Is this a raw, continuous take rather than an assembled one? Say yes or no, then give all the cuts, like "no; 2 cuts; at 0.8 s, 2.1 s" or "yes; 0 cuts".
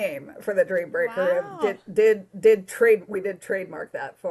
yes; 0 cuts